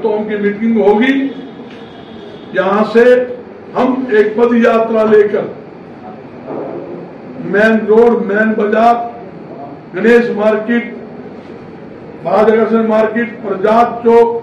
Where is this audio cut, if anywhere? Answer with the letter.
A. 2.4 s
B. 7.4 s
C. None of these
C